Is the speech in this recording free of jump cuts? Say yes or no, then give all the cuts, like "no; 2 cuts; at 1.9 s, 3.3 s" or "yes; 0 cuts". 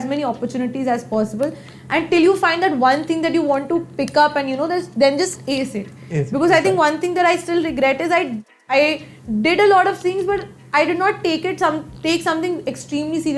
yes; 0 cuts